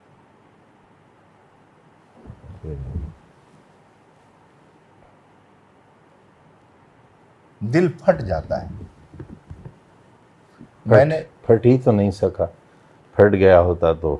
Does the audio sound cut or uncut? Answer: cut